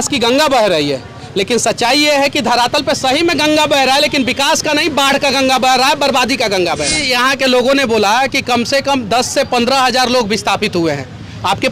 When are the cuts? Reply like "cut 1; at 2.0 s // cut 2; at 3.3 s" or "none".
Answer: cut 1; at 7.0 s